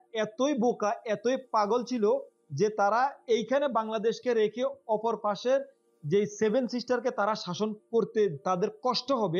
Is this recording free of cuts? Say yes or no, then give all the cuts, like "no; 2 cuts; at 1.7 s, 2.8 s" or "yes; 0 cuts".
yes; 0 cuts